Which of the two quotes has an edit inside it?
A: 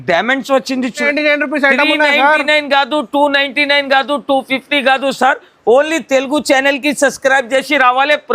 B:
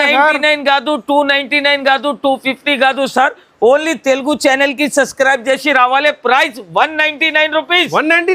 A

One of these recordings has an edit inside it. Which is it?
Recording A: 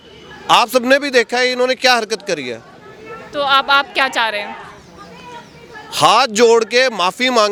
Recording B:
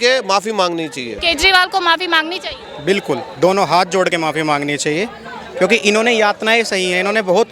B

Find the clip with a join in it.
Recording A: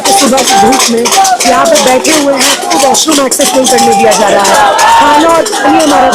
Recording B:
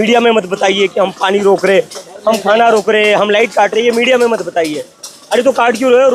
A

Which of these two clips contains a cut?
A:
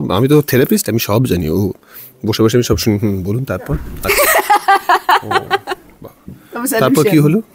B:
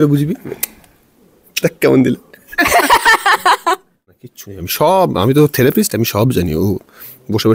B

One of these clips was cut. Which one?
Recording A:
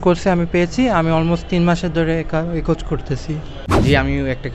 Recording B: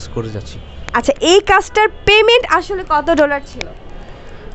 A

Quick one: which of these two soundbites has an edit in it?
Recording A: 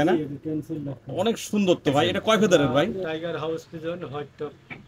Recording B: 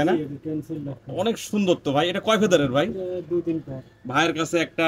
A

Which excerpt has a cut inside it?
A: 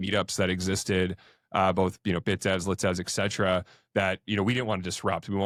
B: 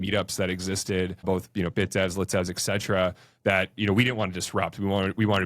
B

